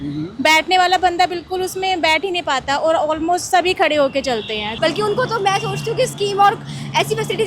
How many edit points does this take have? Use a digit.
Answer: 1